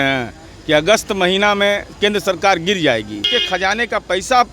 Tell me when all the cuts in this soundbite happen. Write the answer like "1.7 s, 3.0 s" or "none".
3.3 s